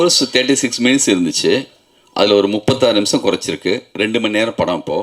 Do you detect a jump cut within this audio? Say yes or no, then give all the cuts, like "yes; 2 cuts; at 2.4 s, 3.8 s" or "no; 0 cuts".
no; 0 cuts